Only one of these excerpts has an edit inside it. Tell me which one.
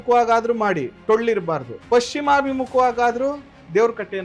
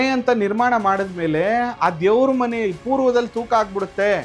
first; 1 cut; at 1.7 s

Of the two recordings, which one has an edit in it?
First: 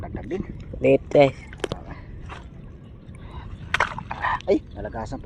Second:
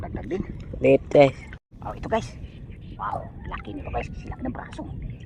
second; 1 cut; at 1.5 s

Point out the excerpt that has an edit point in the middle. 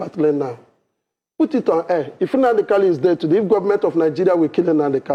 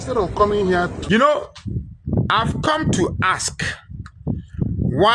second; 1 cut; at 1.0 s

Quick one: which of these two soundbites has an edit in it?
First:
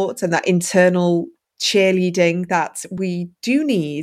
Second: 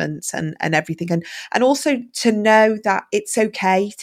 first; 2 cuts; at 1.4 s, 2.9 s

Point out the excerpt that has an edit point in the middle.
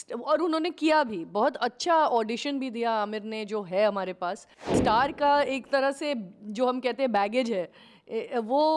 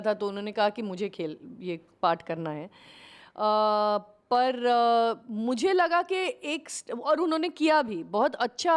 first; 1 cut; at 4.8 s

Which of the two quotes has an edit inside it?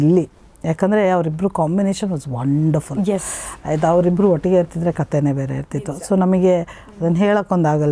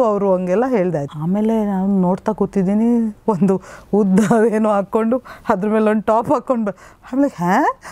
second; 1 cut; at 1.0 s

